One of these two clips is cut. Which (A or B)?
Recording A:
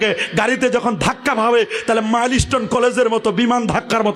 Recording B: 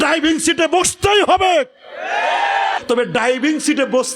B